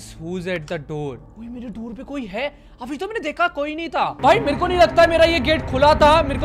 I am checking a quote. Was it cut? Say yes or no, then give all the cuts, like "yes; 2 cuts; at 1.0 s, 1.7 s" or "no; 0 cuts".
yes; 2 cuts; at 1.3 s, 4.2 s